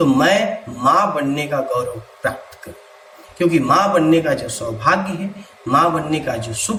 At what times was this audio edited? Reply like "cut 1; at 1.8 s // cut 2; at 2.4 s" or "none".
none